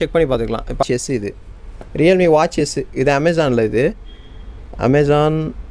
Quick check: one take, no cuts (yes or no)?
yes